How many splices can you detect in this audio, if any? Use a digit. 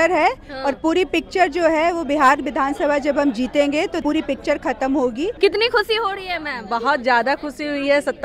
2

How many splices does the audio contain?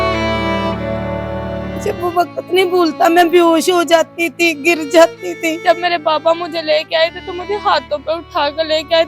2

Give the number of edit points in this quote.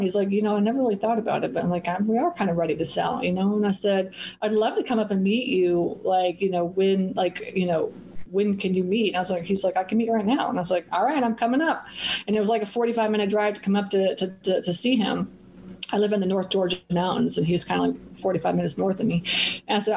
0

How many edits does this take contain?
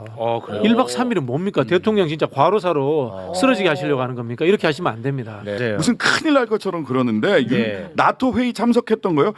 1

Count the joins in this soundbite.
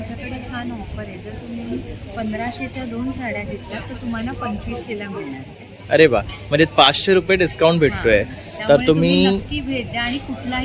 0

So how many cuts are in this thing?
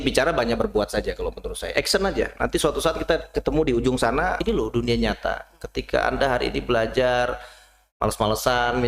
1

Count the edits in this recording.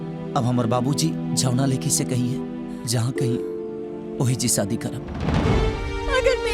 1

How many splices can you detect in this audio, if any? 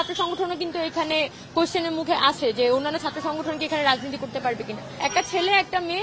1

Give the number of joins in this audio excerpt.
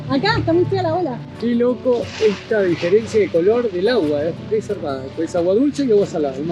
1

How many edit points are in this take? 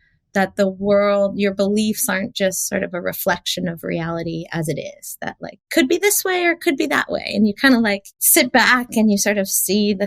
2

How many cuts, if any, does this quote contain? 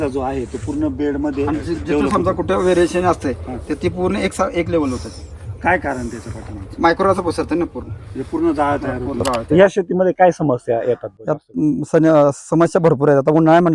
1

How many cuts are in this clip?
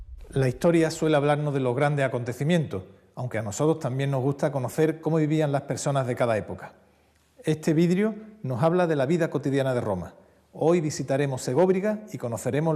1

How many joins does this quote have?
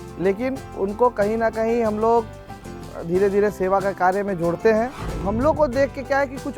1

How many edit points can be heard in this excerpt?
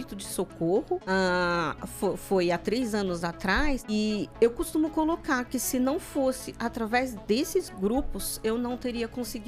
2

